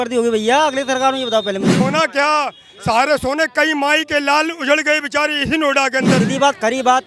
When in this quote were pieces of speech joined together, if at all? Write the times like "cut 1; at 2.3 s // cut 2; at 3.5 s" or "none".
cut 1; at 1.8 s // cut 2; at 6.2 s